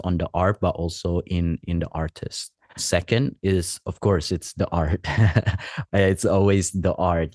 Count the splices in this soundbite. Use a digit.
1